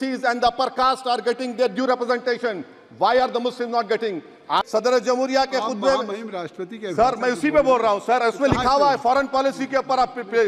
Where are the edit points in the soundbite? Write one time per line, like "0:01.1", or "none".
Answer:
0:04.6